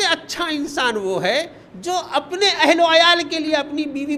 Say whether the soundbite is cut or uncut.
uncut